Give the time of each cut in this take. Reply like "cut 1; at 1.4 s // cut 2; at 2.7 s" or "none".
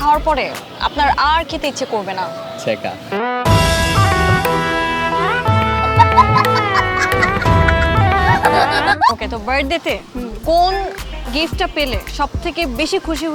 cut 1; at 9.2 s